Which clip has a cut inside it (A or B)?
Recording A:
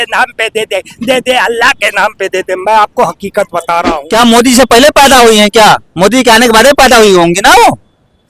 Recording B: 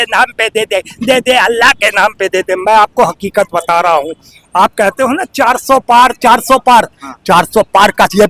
A